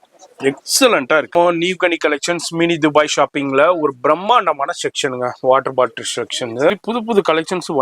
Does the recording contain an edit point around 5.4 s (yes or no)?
no